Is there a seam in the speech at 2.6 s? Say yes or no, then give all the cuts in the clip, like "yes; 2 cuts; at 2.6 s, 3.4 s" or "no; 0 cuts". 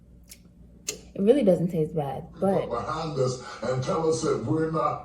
yes; 1 cut; at 2.6 s